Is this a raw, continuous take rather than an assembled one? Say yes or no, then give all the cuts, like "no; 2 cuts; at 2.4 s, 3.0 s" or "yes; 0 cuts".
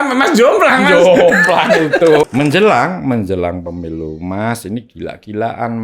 no; 1 cut; at 2.2 s